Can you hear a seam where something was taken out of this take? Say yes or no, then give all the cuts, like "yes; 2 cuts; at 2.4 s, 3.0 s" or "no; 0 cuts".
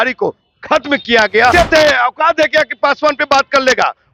yes; 1 cut; at 1.5 s